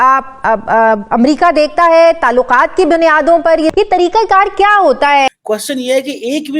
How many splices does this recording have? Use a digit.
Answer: 2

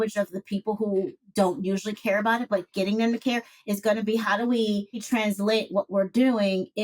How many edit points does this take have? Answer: 1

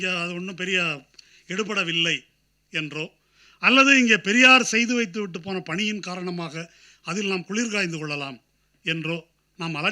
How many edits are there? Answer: 0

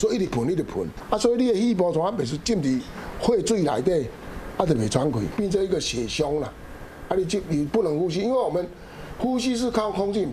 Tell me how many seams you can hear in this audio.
2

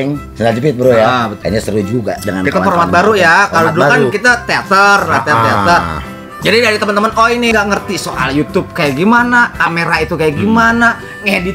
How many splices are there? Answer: 3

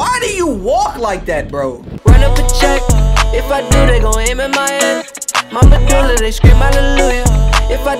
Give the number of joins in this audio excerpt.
1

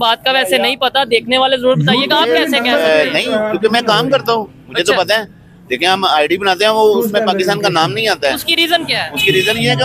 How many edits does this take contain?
0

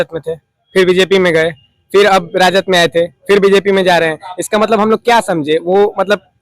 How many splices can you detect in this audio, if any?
0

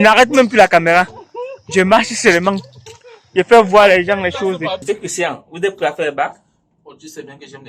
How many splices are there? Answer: 1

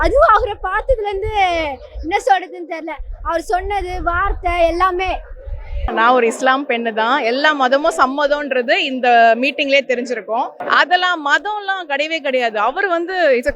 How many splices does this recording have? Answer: 2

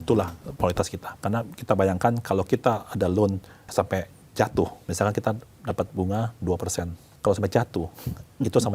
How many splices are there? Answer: 4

